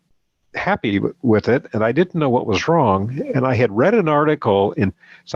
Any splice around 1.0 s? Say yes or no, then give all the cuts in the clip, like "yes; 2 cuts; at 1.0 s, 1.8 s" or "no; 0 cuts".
no; 0 cuts